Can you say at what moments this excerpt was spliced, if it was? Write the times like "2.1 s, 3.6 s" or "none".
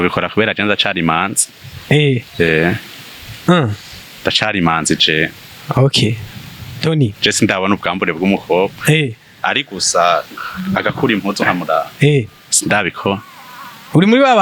none